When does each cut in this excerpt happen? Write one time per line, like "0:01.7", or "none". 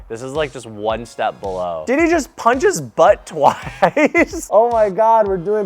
0:01.8
0:04.5